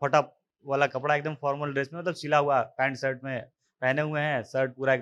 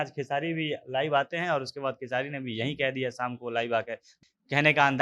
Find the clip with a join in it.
second; 1 cut; at 4.1 s

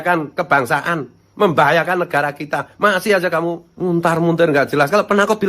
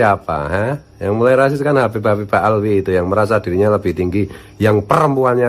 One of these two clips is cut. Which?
first; 1 cut; at 3.7 s

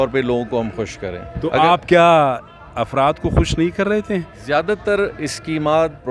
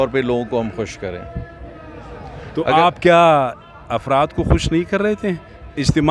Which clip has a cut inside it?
first; 2 cuts; at 1.3 s, 4.4 s

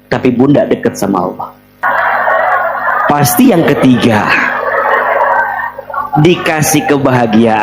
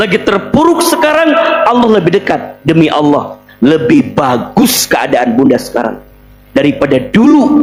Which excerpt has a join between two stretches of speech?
first; 1 cut; at 1.8 s

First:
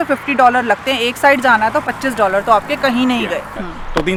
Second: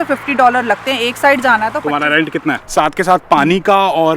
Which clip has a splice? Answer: second; 1 cut; at 2.2 s

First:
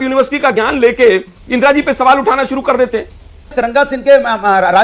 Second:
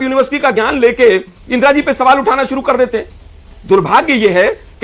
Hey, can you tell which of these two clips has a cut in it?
first; 1 cut; at 3.5 s

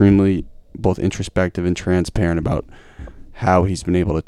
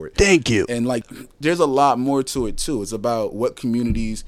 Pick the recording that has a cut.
second; 1 cut; at 1.0 s

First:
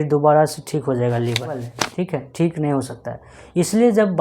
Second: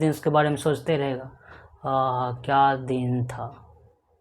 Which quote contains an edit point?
first; 1 cut; at 1.8 s

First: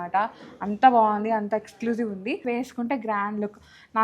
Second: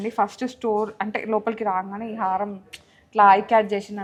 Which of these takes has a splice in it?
first; 1 cut; at 2.4 s

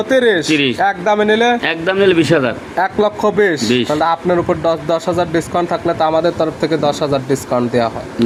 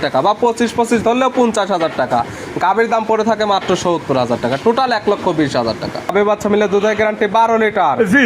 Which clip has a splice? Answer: second; 1 cut; at 6.1 s

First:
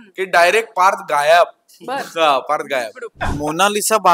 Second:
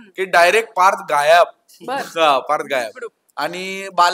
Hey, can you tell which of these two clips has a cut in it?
first; 1 cut; at 3.2 s

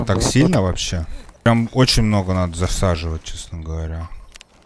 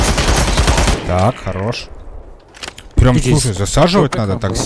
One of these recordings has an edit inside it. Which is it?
first; 1 cut; at 1.5 s

